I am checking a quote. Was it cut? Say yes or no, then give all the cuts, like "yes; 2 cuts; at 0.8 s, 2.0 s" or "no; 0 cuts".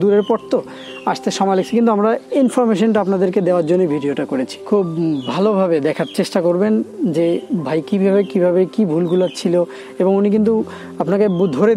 yes; 1 cut; at 4.5 s